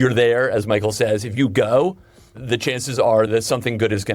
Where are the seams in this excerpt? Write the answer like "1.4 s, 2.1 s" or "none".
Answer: 2.3 s, 3.3 s